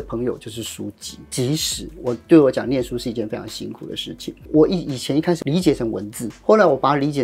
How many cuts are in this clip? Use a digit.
2